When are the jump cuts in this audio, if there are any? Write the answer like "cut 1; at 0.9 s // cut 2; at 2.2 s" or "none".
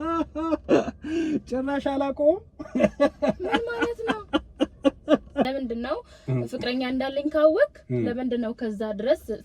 cut 1; at 5.5 s